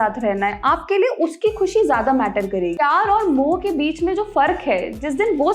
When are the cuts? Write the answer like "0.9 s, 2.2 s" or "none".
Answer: 2.7 s